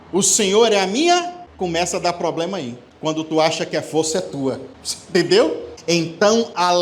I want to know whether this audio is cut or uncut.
cut